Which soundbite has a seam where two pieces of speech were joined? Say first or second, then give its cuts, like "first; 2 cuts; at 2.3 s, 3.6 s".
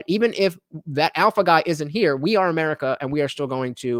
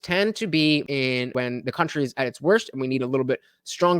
second; 1 cut; at 0.9 s